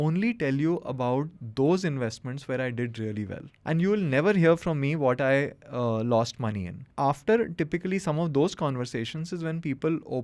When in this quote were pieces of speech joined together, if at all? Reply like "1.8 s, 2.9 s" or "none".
3.5 s, 6.8 s